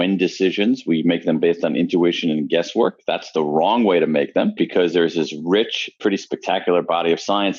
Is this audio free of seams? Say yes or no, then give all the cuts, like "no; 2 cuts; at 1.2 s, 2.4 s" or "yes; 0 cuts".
yes; 0 cuts